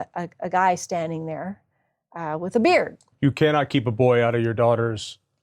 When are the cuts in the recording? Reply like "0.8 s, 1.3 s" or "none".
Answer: 3.1 s